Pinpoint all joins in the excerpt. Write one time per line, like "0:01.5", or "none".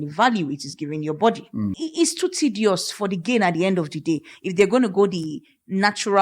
0:01.8